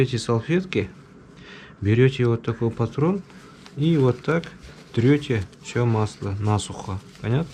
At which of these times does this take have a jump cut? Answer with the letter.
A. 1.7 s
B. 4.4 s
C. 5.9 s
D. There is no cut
D